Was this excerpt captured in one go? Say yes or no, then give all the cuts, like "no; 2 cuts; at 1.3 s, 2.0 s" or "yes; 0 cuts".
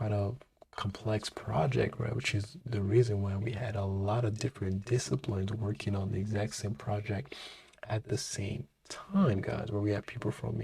yes; 0 cuts